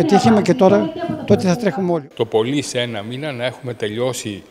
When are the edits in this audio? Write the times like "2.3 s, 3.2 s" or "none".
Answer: 1.9 s